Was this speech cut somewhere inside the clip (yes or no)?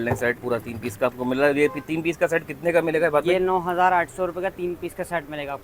no